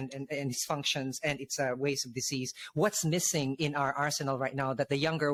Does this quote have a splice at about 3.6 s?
no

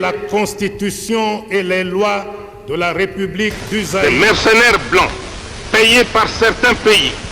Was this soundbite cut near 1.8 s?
no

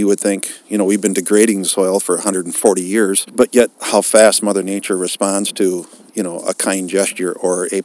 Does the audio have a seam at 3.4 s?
yes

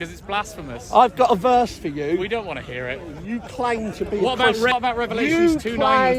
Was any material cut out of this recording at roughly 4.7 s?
yes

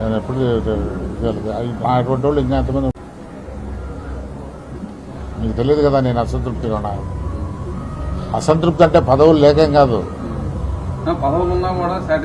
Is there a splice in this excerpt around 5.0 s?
no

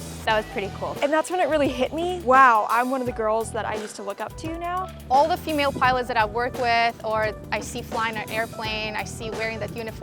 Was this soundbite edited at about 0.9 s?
yes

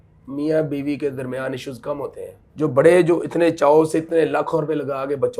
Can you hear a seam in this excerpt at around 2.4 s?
yes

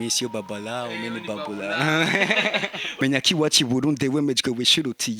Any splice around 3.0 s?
yes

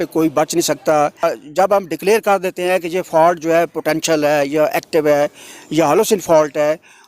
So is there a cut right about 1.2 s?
yes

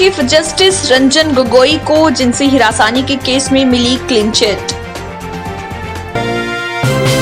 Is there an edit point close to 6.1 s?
yes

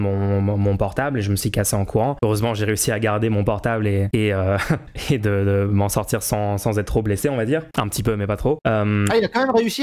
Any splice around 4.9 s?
yes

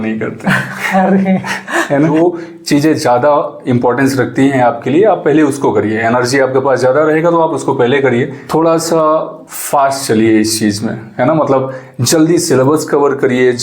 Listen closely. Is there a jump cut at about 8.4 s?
yes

